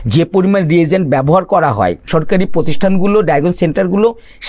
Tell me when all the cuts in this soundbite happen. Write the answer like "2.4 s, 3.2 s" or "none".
2.1 s